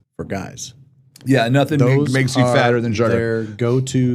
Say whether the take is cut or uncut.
uncut